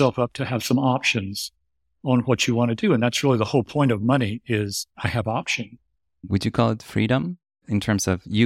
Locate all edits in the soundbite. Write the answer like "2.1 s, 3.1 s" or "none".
4.8 s, 6.2 s, 7.6 s